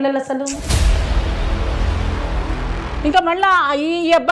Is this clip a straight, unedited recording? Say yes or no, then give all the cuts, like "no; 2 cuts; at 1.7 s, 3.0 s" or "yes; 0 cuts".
no; 1 cut; at 2.8 s